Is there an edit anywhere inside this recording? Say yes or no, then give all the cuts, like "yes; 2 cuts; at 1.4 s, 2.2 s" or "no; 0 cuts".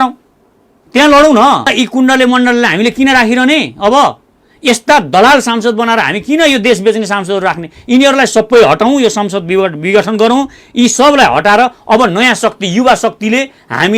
yes; 1 cut; at 1.7 s